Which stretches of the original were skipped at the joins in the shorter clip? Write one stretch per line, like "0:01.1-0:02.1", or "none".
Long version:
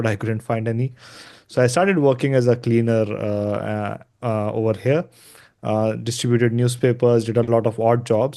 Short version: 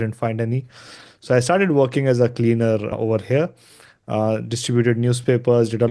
0:03.2-0:04.5